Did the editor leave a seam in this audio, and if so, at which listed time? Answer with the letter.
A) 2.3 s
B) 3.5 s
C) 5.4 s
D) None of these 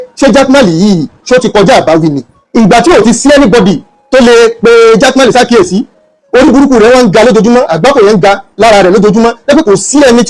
A